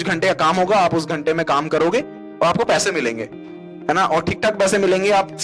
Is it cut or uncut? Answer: uncut